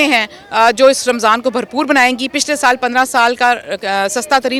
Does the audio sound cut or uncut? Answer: uncut